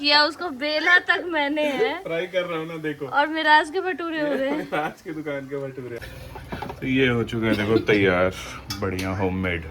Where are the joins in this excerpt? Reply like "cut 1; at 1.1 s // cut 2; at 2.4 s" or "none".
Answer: cut 1; at 6.0 s